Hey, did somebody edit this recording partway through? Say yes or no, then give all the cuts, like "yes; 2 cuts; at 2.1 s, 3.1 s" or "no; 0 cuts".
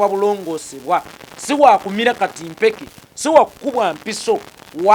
no; 0 cuts